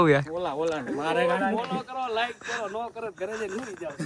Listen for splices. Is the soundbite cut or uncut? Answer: uncut